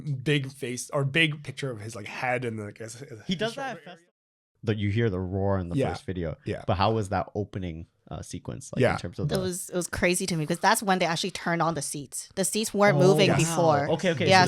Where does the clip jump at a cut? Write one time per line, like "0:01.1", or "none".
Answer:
0:03.9